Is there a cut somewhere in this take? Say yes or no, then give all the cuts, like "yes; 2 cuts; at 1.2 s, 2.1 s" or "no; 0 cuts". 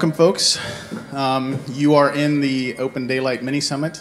no; 0 cuts